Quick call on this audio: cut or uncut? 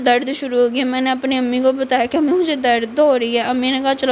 uncut